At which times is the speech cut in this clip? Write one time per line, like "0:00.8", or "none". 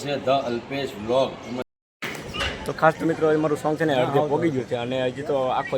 0:01.7